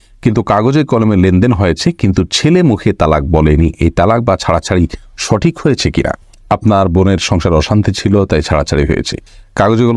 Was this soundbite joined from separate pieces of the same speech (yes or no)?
no